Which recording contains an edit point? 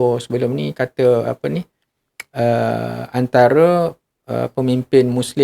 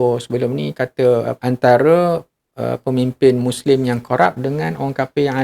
second; 1 cut; at 1.3 s

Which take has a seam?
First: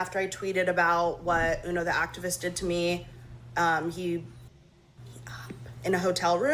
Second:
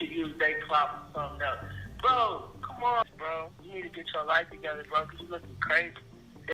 second; 1 cut; at 3.0 s

